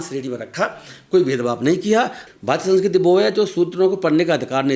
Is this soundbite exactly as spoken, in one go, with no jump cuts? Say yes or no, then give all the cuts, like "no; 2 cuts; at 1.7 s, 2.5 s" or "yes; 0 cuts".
no; 1 cut; at 2.2 s